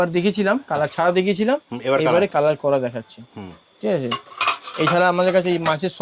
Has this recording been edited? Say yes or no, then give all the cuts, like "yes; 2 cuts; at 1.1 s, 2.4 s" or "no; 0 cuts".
no; 0 cuts